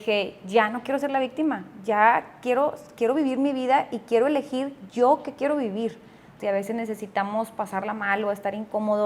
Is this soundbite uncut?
no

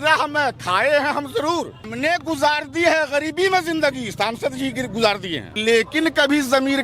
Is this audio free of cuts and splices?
no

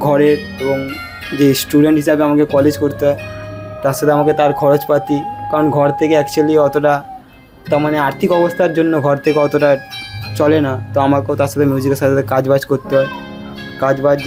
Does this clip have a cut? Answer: no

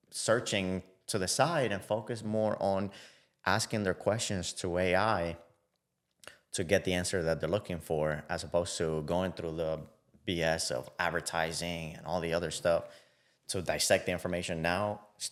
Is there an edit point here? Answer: no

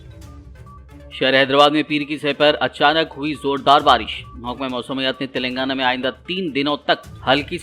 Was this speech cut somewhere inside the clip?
no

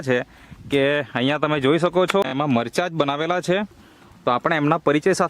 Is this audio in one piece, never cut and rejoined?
no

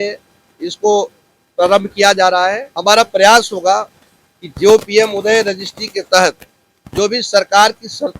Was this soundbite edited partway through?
yes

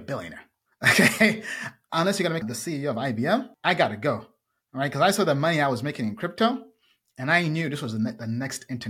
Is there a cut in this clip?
yes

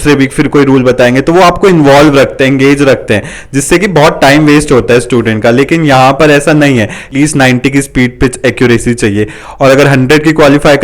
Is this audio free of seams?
no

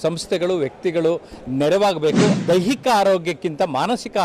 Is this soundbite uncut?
no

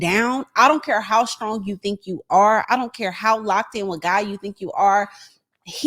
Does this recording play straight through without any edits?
yes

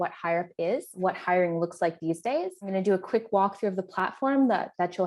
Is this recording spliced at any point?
yes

